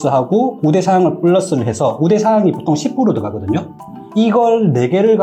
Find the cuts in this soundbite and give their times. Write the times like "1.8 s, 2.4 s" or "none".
4.0 s